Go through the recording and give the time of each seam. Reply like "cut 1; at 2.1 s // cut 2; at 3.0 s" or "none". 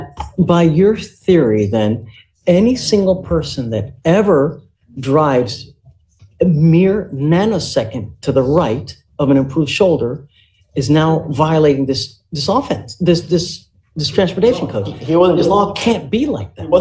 none

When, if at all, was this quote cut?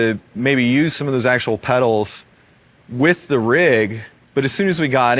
cut 1; at 1.0 s

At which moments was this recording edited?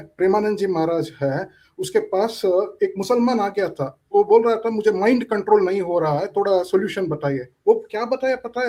none

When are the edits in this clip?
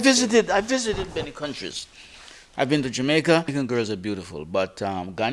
cut 1; at 3.5 s

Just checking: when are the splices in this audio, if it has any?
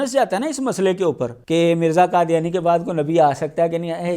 cut 1; at 1.3 s

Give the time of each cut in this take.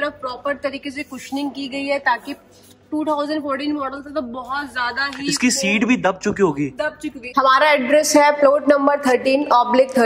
cut 1; at 7.2 s

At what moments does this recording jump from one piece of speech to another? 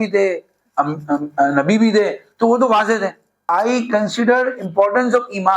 cut 1; at 3.5 s

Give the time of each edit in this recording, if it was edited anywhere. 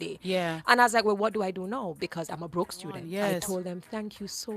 cut 1; at 3.0 s

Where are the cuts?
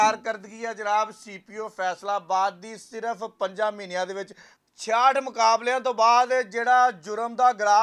none

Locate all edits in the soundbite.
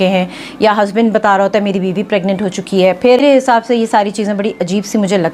cut 1; at 3.2 s

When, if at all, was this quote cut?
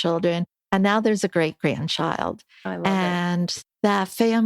cut 1; at 3.6 s

